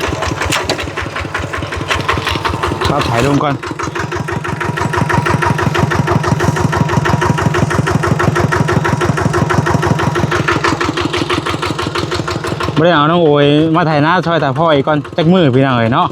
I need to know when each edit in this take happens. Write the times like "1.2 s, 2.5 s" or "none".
2.9 s